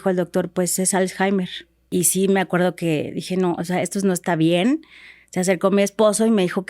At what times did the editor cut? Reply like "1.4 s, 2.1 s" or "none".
1.9 s